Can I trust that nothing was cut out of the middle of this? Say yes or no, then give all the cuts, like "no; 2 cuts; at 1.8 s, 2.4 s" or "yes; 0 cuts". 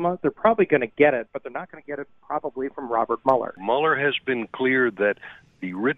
no; 1 cut; at 3.6 s